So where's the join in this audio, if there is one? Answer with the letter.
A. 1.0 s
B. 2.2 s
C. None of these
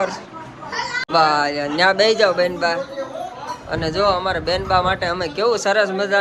A